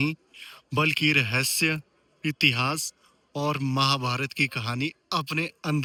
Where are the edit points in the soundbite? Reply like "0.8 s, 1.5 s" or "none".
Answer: none